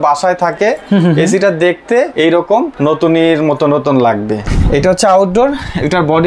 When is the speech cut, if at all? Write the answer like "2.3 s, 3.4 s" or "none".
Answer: 2.5 s, 4.4 s